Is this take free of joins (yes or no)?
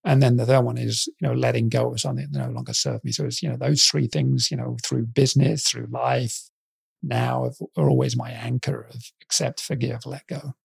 yes